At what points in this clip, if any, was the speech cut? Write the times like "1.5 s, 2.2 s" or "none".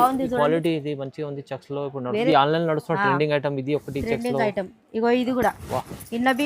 2.3 s